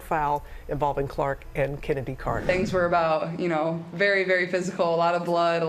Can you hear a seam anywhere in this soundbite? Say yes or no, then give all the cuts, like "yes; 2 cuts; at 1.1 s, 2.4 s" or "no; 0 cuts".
yes; 1 cut; at 2.4 s